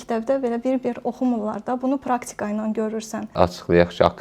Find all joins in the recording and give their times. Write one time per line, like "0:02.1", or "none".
0:03.3